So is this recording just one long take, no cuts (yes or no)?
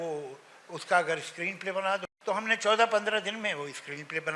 no